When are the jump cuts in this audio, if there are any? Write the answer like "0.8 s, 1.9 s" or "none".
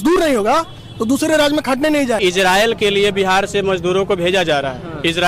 2.2 s

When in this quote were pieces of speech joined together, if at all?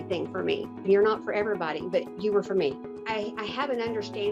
0.9 s, 2.9 s

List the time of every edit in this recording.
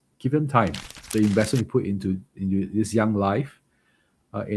1.1 s

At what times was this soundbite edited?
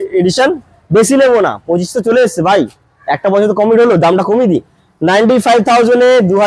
none

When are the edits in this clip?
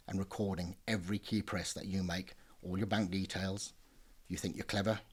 none

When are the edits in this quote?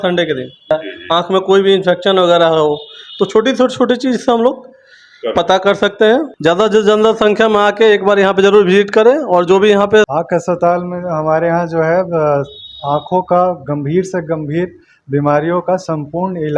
0.7 s, 6.3 s, 10.2 s

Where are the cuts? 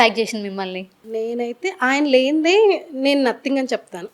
0.9 s

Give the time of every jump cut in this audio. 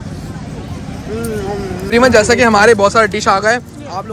1.9 s

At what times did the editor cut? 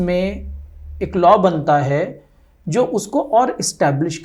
none

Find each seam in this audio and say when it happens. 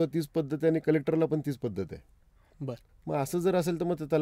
2.8 s

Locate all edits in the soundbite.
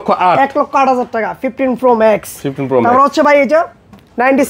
none

